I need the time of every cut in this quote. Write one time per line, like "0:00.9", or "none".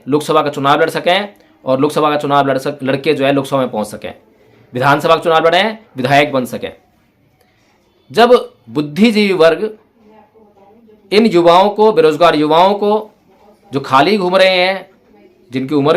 0:08.6